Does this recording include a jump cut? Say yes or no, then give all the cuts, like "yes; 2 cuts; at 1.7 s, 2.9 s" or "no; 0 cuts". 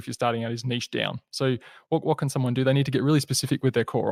no; 0 cuts